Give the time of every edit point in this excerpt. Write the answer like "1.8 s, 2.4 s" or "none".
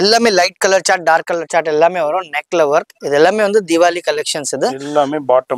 none